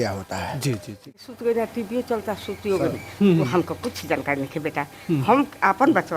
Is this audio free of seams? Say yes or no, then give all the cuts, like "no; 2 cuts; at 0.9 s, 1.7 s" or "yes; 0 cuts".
no; 1 cut; at 1.0 s